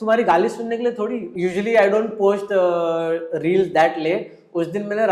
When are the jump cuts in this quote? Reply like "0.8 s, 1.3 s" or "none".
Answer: 1.2 s